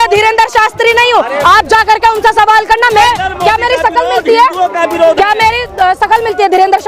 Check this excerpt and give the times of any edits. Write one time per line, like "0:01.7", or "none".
0:03.0